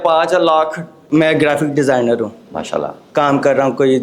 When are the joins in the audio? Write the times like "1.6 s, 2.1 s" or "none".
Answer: 1.0 s